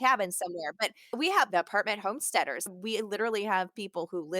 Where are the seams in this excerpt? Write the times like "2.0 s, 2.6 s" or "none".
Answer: 1.1 s, 2.7 s